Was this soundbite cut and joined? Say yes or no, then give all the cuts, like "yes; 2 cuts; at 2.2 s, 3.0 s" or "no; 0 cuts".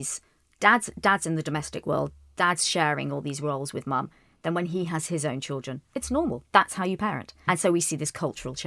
yes; 1 cut; at 7.4 s